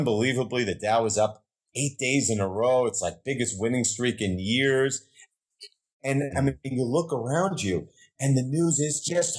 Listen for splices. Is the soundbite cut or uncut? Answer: cut